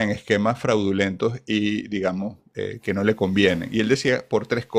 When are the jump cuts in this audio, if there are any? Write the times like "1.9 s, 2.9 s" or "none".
none